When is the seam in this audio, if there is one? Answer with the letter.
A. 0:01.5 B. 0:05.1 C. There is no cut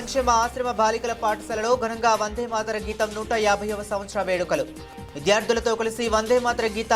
C